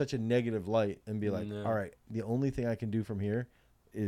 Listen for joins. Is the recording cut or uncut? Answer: uncut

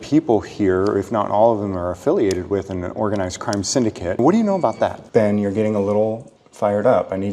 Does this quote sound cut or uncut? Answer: cut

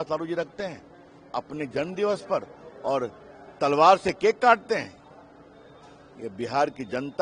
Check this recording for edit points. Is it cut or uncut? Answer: uncut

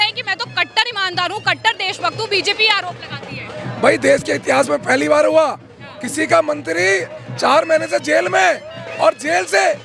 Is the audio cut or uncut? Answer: uncut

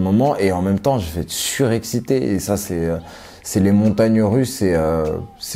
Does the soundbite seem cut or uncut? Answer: uncut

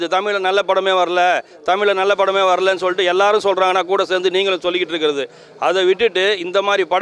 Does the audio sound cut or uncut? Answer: uncut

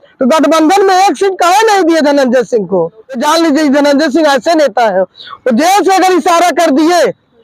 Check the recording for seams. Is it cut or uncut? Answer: cut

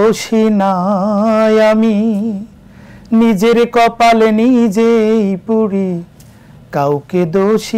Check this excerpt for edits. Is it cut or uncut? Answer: uncut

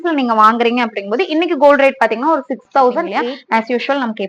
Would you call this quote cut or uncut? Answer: cut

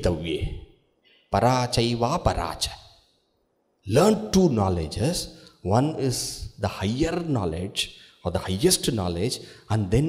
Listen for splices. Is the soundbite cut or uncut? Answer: uncut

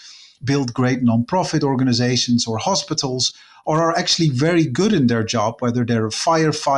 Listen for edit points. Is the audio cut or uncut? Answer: uncut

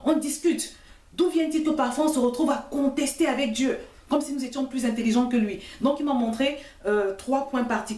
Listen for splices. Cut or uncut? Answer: uncut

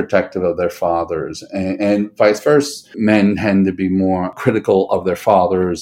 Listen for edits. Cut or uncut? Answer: cut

